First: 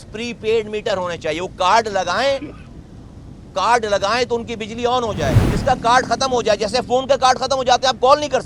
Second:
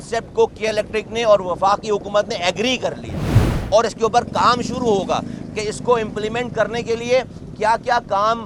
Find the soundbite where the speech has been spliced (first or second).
first